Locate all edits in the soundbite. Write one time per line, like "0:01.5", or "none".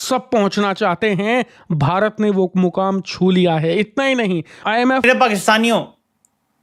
0:05.0

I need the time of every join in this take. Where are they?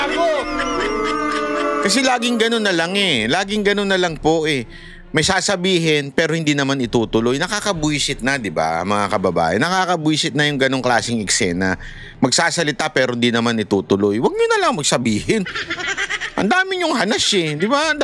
none

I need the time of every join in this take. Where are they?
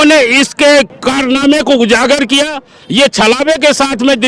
0:01.0

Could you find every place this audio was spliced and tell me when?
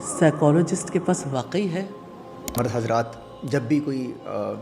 0:02.5

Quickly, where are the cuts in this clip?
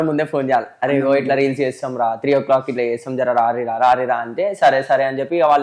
none

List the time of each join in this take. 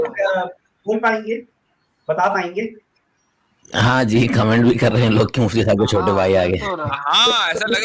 none

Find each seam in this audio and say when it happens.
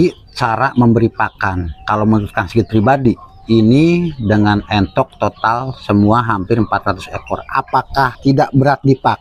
0:08.2

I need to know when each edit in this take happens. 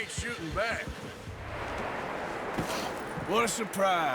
0:01.4

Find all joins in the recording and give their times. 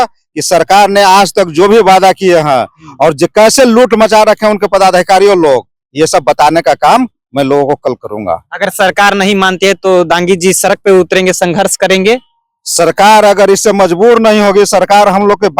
none

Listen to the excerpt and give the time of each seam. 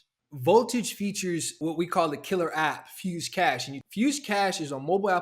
0:01.5
0:03.7

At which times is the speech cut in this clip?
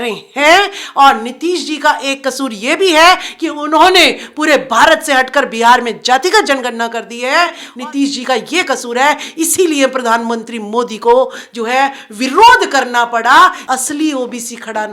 0:07.6
0:13.6

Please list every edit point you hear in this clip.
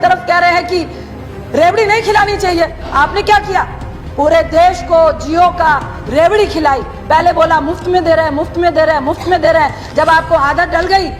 none

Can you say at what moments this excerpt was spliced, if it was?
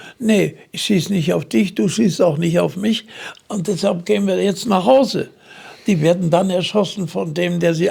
none

